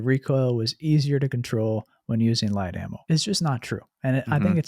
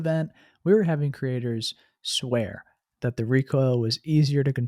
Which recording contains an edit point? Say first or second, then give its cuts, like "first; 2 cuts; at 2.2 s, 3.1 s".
first; 1 cut; at 2.9 s